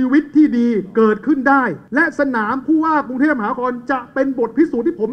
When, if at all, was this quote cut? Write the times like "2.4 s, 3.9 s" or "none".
1.8 s